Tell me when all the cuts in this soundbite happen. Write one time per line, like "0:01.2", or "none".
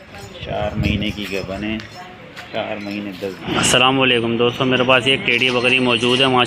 0:03.4